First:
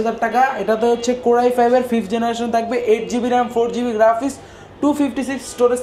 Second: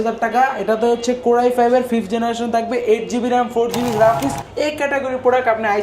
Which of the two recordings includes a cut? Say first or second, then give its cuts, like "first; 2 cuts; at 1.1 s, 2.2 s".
second; 1 cut; at 4.4 s